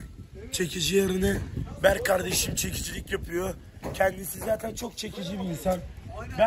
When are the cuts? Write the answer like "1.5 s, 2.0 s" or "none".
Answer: none